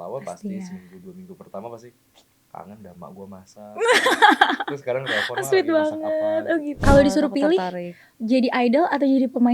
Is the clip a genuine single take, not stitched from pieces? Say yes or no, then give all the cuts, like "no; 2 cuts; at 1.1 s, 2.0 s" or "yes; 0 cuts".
no; 1 cut; at 6.8 s